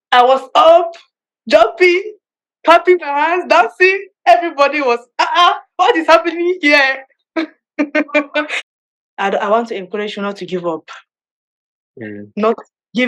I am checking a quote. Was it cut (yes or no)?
yes